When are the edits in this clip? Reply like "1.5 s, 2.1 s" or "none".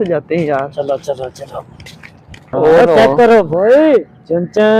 2.5 s